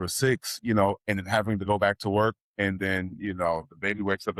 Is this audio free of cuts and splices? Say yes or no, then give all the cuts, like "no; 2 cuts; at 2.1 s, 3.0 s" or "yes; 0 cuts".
yes; 0 cuts